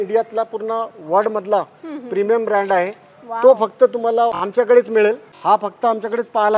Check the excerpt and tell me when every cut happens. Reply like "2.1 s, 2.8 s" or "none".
4.4 s, 5.3 s